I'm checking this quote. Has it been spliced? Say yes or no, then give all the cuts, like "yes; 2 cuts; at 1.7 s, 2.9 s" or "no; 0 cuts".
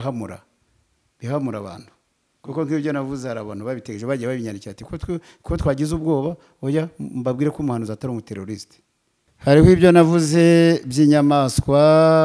yes; 1 cut; at 9.3 s